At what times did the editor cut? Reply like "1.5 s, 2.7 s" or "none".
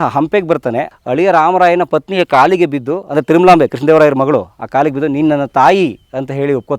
0.9 s